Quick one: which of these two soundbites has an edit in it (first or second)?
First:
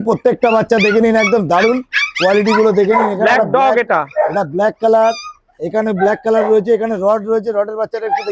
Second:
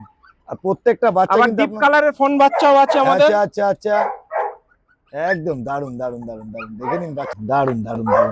second